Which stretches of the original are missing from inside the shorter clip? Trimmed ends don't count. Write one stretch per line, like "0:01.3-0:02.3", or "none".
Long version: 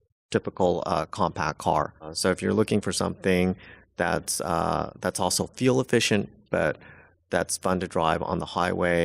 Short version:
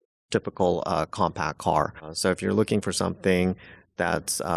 none